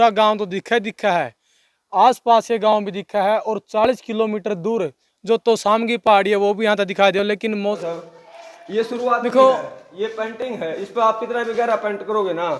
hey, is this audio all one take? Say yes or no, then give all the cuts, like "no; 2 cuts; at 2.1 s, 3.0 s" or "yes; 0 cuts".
no; 1 cut; at 7.8 s